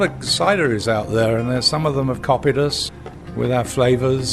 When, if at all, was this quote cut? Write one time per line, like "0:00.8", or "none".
0:02.8